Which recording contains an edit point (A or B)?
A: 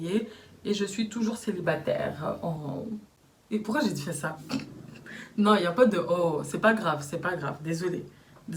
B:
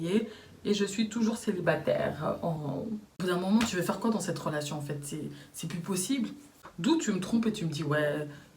B